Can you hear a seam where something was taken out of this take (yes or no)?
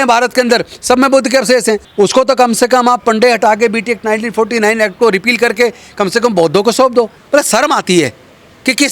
yes